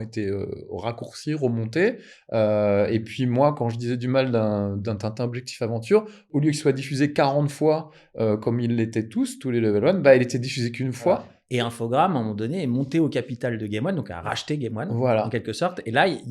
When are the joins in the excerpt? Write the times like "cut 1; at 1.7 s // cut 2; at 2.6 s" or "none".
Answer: cut 1; at 6.2 s // cut 2; at 11.4 s

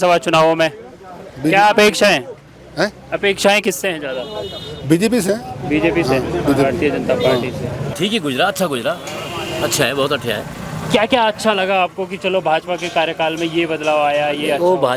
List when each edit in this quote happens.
cut 1; at 7.8 s

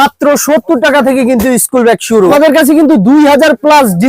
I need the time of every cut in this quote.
cut 1; at 2.3 s

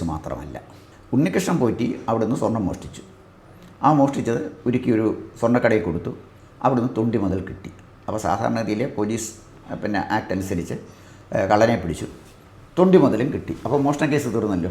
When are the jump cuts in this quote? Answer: cut 1; at 1.0 s

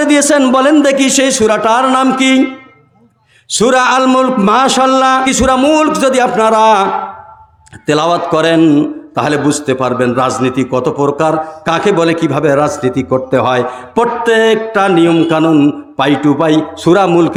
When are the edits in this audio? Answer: none

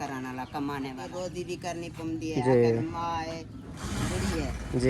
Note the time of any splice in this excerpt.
cut 1; at 1.0 s

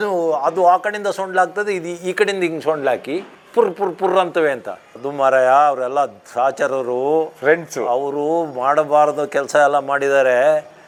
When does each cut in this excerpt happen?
none

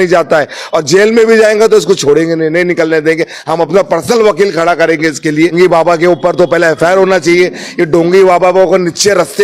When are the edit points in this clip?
cut 1; at 5.5 s

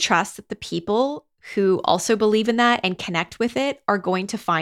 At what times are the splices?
none

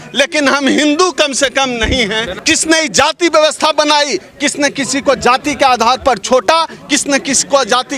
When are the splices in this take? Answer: cut 1; at 2.3 s

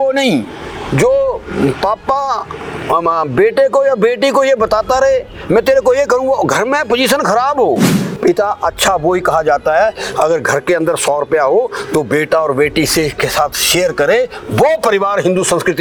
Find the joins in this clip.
none

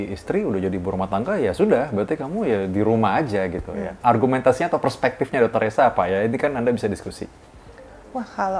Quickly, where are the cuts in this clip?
cut 1; at 3.9 s

